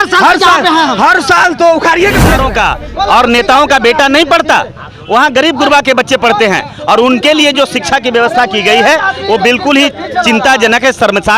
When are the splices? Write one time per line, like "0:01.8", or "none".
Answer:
0:02.3